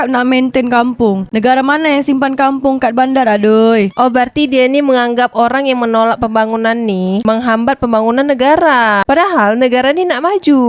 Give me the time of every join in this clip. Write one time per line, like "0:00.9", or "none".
0:03.9